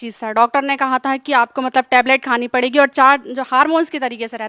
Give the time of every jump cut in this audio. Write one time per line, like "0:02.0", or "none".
none